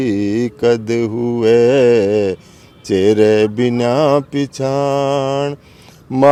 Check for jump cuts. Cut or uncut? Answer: uncut